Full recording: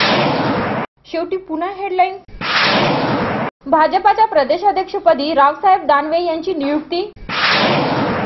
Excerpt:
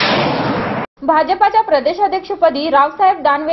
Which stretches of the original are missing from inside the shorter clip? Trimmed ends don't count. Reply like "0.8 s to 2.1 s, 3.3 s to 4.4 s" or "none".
0.9 s to 3.6 s